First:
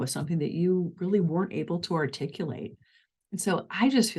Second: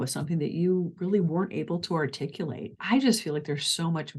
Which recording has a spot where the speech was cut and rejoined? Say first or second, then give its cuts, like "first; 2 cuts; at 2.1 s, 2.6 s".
second; 1 cut; at 2.8 s